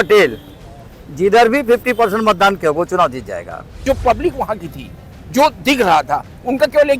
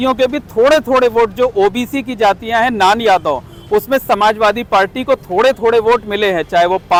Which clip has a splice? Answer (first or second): first